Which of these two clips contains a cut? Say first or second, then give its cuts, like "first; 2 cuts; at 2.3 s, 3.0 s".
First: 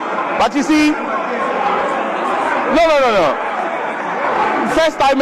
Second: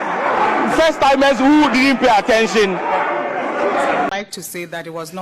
second; 1 cut; at 4.1 s